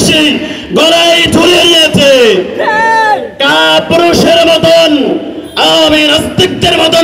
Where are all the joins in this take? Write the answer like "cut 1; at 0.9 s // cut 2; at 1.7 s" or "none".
none